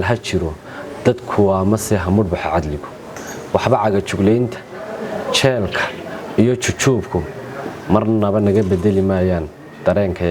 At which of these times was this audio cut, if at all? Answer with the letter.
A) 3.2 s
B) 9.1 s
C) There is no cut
A